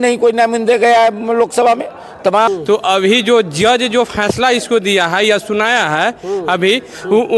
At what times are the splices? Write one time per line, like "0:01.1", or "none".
0:02.5